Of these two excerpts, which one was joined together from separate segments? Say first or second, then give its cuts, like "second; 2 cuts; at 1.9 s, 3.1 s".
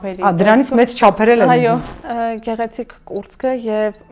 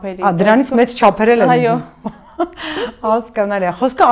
first; 1 cut; at 1.9 s